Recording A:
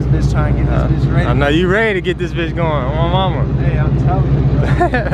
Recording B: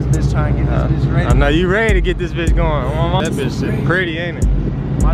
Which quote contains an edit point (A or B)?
B